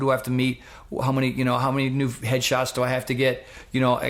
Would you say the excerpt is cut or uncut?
uncut